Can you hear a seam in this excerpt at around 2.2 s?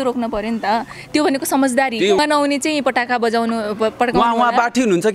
yes; 1 cut; at 2.2 s

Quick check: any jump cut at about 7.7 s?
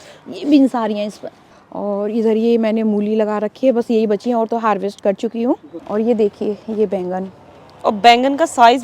no; 1 cut; at 5.7 s

